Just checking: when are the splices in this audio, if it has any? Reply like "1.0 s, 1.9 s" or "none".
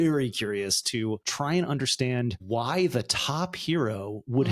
none